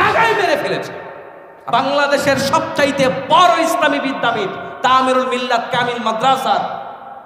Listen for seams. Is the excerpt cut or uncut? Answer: cut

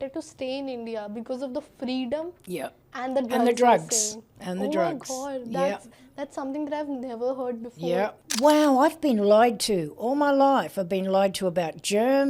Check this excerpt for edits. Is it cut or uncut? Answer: cut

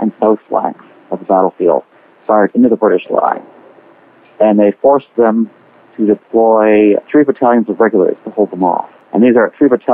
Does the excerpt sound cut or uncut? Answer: uncut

